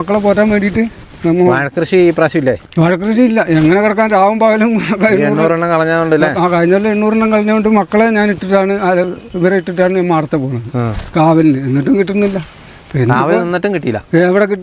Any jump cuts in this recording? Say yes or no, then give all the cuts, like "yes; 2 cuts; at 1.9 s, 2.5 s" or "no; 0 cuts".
no; 0 cuts